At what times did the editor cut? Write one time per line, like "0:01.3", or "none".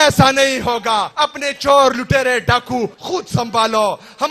0:01.1
0:03.0